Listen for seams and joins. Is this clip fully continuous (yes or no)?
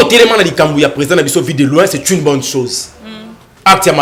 yes